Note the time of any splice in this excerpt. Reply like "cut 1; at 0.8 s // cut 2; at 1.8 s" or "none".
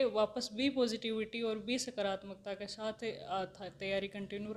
none